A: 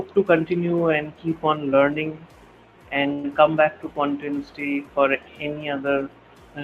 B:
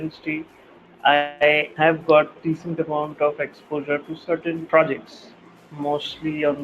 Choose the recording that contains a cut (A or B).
B